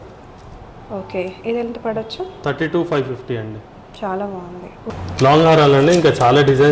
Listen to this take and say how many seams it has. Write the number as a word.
one